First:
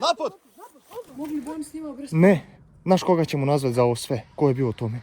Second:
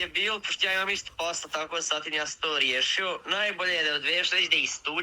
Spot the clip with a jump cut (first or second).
first